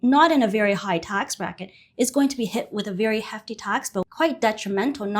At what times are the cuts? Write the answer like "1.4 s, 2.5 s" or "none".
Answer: 4.0 s